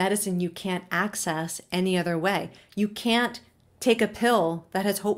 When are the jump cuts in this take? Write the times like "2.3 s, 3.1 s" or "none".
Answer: none